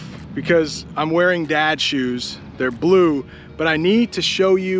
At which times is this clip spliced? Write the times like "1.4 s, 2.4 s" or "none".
none